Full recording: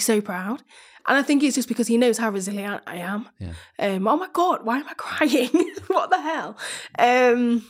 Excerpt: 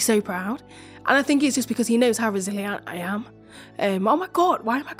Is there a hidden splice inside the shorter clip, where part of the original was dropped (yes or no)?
no